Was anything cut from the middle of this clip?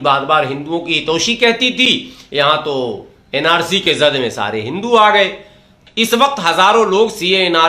yes; 1 cut; at 5.8 s

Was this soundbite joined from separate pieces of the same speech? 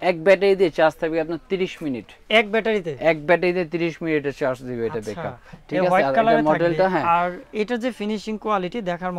no; 0 cuts

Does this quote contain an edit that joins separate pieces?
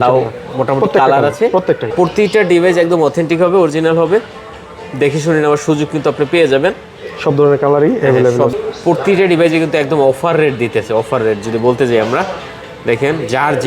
yes; 2 cuts; at 1.9 s, 8.5 s

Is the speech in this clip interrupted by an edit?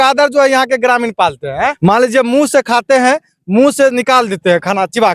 yes; 1 cut; at 1.8 s

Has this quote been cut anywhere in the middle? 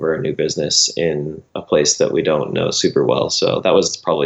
no; 0 cuts

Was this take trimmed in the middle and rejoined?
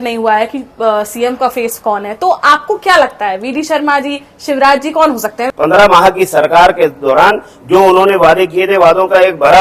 yes; 1 cut; at 5.4 s

